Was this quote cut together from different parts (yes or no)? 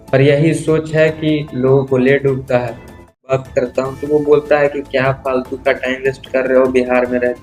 yes